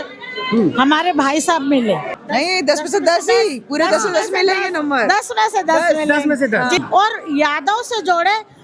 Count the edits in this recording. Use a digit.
2